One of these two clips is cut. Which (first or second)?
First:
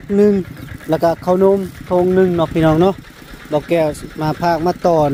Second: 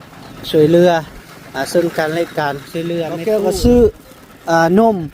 second